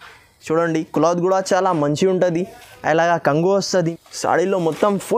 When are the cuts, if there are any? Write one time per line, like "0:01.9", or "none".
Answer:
0:03.7

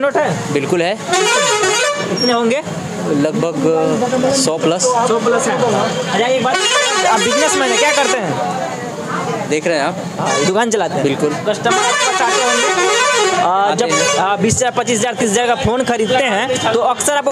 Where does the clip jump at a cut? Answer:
none

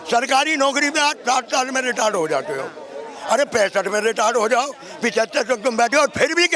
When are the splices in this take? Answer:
none

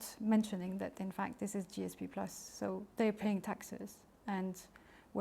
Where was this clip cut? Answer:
none

